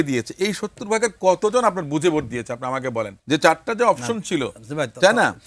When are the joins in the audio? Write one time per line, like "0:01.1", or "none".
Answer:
0:03.2